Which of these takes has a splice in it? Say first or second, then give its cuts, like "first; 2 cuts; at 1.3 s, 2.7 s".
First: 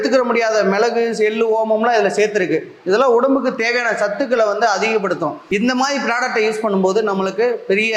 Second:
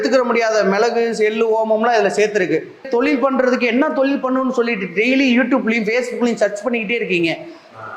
second; 1 cut; at 2.8 s